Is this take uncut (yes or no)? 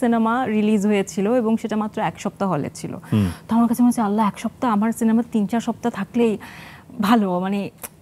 yes